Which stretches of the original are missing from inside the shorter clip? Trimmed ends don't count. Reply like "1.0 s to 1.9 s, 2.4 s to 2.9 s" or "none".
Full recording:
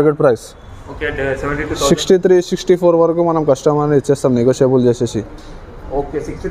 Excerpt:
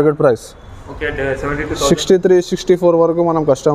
none